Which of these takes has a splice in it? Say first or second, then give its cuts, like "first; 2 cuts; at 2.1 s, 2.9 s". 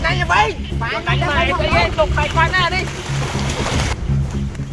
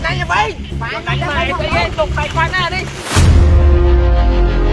second; 1 cut; at 3.0 s